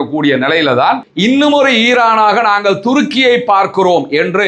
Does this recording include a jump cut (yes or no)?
yes